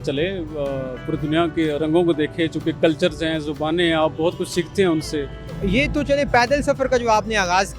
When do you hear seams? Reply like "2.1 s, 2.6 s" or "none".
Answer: 5.5 s

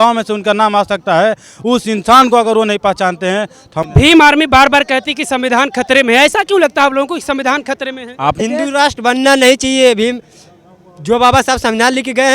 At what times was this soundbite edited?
3.9 s, 8.4 s

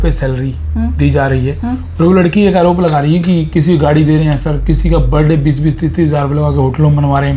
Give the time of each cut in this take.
none

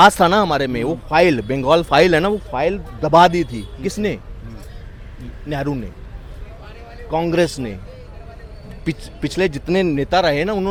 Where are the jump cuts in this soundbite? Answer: none

